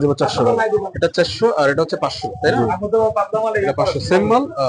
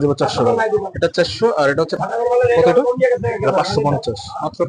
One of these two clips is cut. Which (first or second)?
second